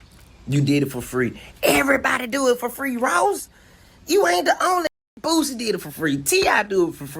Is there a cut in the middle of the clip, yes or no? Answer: no